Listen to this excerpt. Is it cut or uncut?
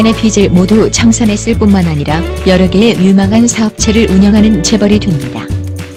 uncut